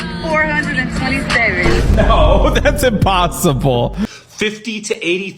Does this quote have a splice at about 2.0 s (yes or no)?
no